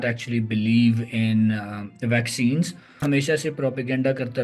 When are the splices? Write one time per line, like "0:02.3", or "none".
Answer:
0:03.0